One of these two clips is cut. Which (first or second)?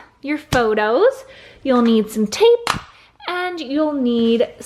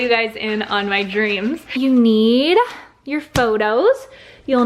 second